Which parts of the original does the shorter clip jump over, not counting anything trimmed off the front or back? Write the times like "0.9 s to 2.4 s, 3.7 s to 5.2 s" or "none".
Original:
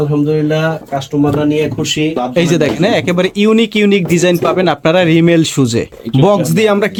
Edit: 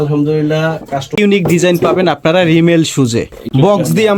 1.1 s to 3.7 s